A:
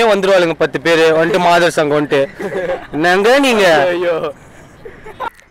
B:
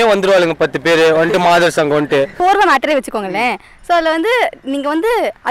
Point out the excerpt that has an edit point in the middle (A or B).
B